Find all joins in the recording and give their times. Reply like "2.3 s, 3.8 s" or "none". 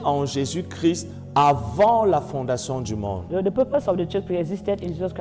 none